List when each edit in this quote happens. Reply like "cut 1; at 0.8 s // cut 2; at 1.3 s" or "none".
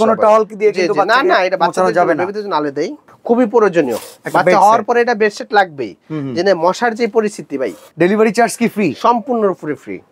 cut 1; at 3.1 s // cut 2; at 7.8 s